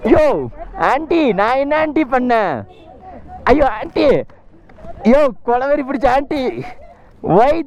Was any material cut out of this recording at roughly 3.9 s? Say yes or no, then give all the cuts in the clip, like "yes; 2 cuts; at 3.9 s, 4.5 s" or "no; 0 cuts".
no; 0 cuts